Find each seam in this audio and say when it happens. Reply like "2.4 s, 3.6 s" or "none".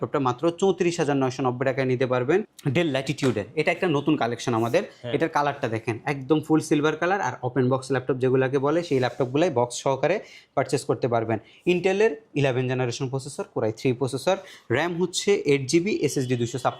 2.5 s